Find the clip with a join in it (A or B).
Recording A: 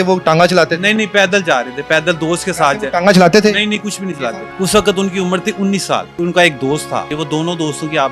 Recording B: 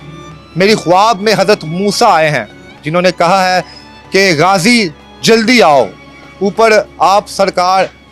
A